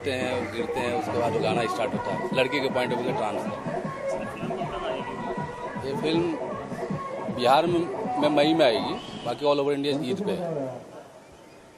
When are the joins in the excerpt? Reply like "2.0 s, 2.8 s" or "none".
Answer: 1.9 s